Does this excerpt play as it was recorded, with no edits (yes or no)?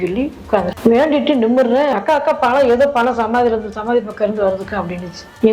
no